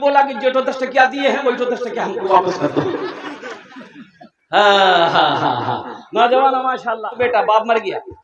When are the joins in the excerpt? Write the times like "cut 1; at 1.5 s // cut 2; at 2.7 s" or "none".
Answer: cut 1; at 7.2 s